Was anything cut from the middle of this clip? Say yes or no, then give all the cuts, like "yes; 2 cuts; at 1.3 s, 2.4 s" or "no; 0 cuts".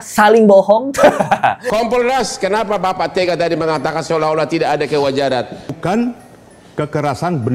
yes; 2 cuts; at 1.6 s, 5.8 s